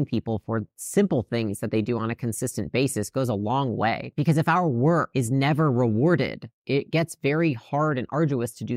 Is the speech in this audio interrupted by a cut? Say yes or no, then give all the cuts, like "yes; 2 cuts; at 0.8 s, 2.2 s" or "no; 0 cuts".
no; 0 cuts